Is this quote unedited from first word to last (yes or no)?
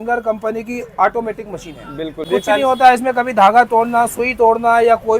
no